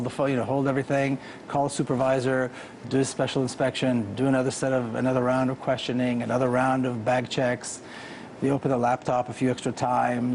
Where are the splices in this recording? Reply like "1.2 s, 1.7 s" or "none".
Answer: none